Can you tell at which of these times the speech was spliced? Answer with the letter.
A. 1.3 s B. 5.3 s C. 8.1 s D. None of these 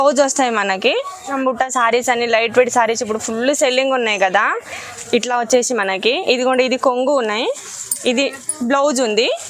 A